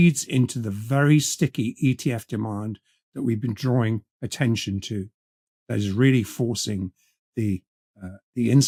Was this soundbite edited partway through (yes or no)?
no